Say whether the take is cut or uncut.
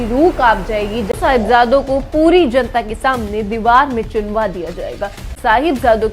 cut